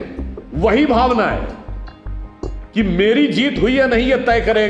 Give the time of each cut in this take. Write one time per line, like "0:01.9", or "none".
none